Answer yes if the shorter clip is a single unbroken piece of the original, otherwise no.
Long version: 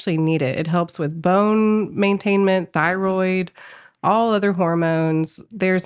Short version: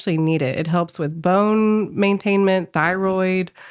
yes